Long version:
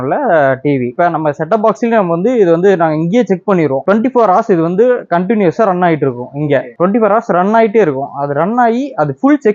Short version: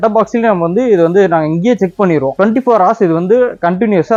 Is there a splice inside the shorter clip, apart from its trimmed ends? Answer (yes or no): no